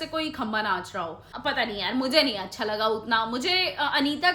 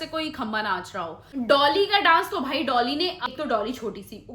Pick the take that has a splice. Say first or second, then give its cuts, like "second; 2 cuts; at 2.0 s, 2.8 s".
second; 2 cuts; at 1.2 s, 3.3 s